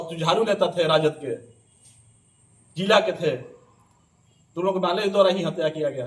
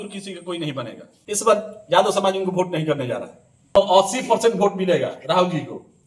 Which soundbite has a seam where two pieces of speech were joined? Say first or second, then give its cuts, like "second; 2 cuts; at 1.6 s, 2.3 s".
second; 2 cuts; at 1.0 s, 3.7 s